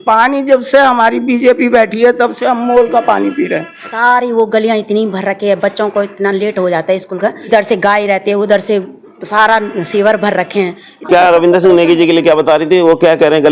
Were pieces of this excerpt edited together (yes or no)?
yes